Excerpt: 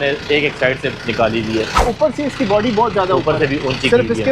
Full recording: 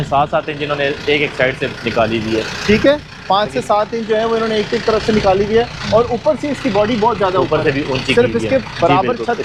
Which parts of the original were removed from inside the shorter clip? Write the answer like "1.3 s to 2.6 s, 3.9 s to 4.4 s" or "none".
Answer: 2.6 s to 6.1 s

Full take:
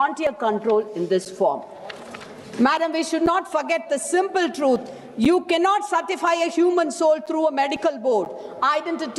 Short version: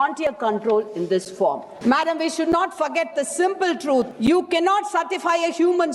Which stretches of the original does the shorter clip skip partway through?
1.7 s to 2.4 s, 4.9 s to 5.1 s

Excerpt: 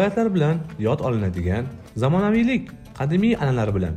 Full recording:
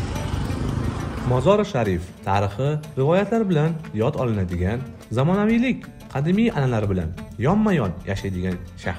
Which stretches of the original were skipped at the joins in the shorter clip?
none

